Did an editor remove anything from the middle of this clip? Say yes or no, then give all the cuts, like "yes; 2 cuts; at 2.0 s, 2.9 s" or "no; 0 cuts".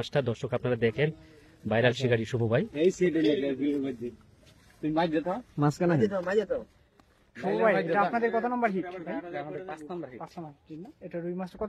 no; 0 cuts